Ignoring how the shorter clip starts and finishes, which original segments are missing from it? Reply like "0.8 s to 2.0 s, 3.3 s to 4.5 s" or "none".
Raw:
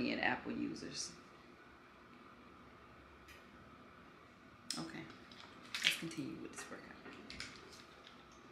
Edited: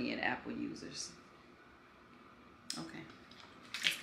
2.6 s to 4.6 s